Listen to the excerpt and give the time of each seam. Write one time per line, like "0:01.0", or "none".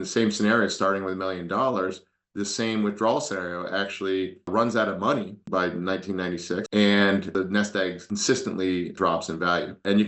0:06.6